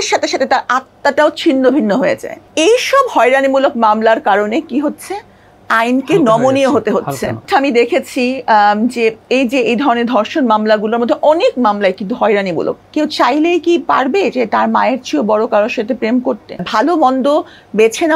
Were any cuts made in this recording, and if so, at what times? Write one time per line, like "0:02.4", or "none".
0:02.4
0:07.4
0:12.8
0:16.7